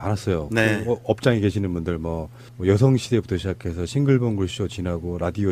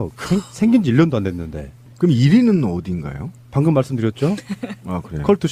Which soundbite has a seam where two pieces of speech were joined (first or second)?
second